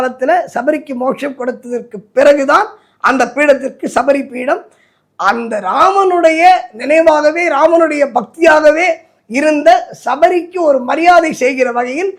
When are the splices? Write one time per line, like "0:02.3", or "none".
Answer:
none